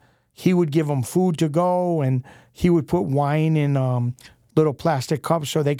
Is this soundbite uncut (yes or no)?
yes